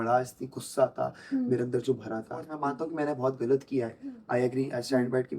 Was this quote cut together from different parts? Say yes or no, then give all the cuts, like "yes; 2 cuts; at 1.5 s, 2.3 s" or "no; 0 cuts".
yes; 1 cut; at 2.5 s